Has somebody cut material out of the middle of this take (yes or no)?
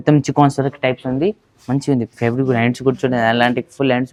no